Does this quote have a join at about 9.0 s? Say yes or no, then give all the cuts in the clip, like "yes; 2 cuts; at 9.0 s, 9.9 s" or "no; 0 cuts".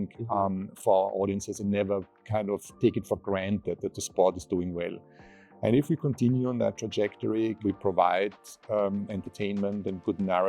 no; 1 cut; at 7.6 s